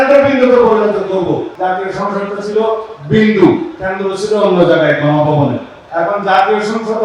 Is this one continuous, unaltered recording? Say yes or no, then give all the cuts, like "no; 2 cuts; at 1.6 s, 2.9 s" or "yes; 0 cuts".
no; 2 cuts; at 1.5 s, 5.8 s